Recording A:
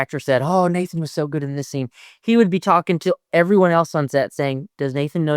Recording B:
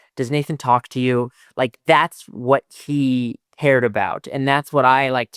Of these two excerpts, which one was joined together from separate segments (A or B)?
B